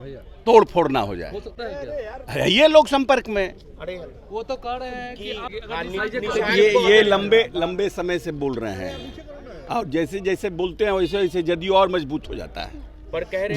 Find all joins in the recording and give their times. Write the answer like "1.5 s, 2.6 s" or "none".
5.5 s